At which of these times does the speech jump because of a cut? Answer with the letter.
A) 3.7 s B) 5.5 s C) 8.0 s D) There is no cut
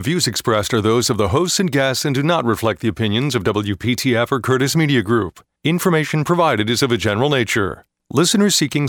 D